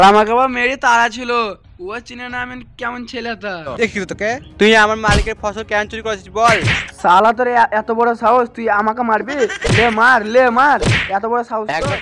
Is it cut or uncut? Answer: cut